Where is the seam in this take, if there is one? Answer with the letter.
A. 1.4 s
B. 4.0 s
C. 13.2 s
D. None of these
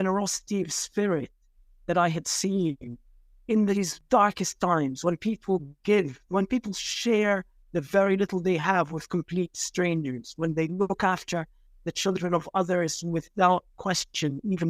B